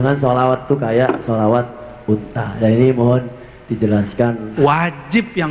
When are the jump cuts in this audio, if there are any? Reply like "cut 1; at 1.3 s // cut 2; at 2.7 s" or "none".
cut 1; at 4.5 s